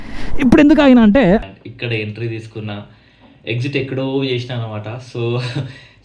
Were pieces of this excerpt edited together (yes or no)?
yes